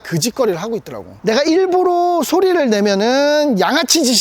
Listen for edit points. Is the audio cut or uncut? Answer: cut